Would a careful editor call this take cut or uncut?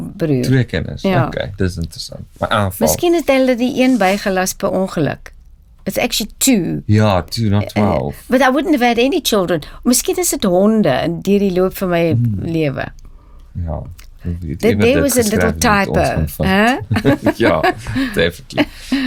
uncut